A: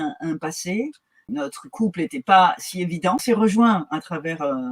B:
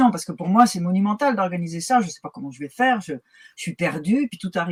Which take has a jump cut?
A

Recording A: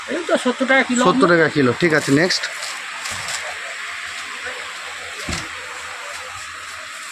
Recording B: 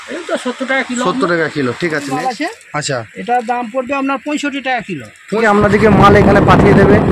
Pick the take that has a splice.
B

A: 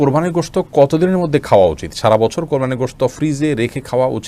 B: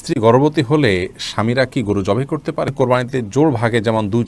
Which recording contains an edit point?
B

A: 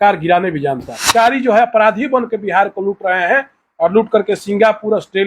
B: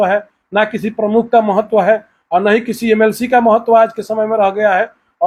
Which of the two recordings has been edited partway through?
A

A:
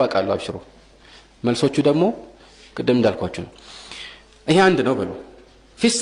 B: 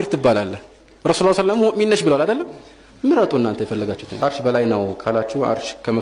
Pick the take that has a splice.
B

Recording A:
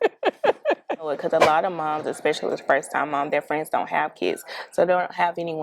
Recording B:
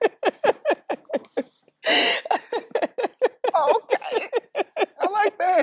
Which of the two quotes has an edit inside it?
A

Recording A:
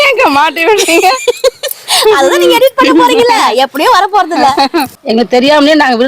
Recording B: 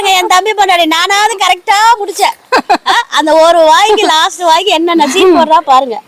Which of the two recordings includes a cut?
A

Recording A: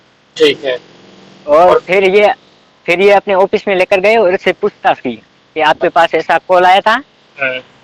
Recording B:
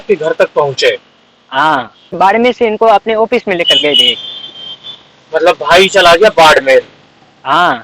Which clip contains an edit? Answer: B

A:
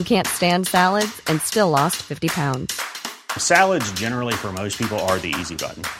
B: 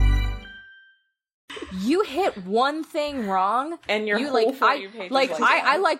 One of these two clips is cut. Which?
B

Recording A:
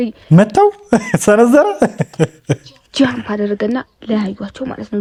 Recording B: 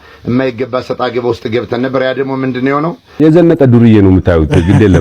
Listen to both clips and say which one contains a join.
B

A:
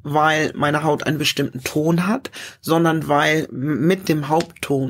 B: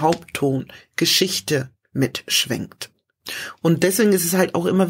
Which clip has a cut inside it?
B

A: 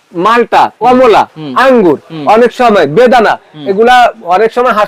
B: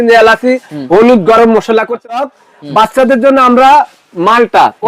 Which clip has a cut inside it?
B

